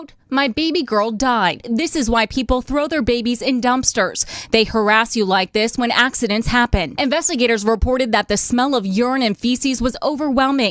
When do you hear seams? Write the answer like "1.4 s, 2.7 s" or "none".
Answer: 1.6 s, 6.9 s